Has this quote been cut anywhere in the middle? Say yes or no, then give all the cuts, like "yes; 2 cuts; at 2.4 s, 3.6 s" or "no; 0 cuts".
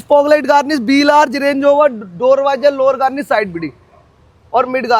no; 0 cuts